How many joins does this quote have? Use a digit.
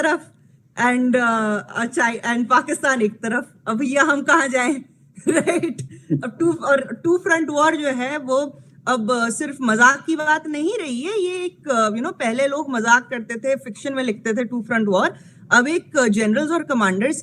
0